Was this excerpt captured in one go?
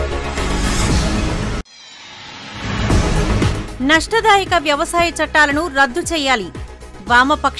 no; 1 cut; at 1.5 s

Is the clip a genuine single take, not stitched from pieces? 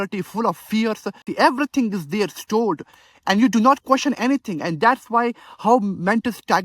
no; 1 cut; at 1.2 s

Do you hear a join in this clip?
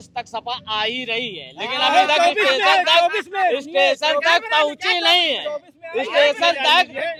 no; 0 cuts

